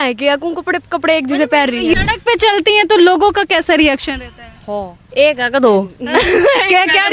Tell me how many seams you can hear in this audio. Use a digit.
1